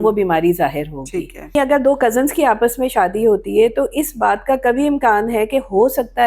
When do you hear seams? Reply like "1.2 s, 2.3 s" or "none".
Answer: 1.5 s